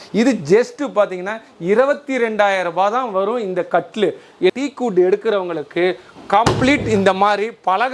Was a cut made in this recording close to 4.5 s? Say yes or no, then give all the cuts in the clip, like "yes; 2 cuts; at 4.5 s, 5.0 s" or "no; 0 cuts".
yes; 1 cut; at 4.5 s